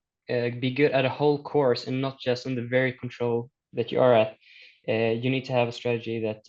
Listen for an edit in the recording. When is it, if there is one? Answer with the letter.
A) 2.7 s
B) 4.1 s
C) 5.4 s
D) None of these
D